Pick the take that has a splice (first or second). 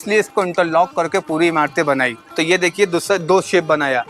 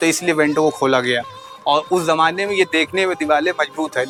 first